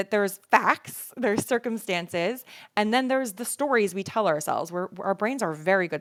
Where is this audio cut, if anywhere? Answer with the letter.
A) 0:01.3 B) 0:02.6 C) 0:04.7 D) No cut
D